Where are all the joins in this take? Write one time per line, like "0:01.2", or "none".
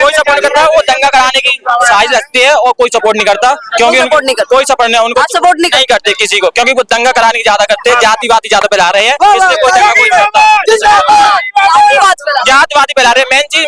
none